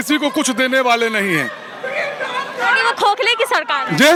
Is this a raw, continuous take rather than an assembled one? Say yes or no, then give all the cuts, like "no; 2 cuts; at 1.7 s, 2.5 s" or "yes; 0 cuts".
yes; 0 cuts